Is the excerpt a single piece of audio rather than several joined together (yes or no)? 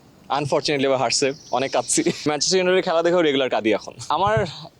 no